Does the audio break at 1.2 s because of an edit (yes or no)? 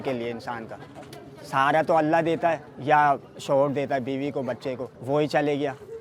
no